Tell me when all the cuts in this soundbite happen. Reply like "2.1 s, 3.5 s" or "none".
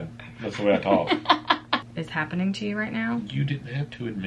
1.9 s